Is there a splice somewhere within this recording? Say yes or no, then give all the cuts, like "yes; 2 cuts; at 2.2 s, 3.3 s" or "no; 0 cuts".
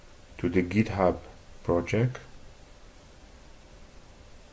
yes; 1 cut; at 1.3 s